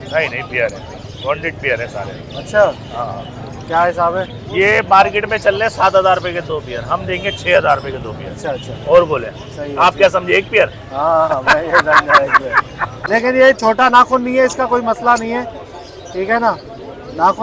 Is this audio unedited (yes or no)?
no